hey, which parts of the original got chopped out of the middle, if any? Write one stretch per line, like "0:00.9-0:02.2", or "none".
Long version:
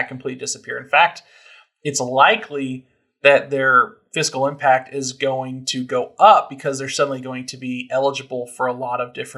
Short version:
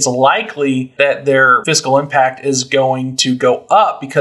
0:02.8-0:03.1
0:03.8-0:04.1